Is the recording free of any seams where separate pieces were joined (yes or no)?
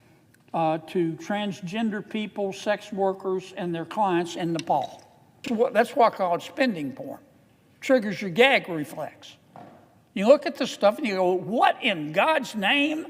no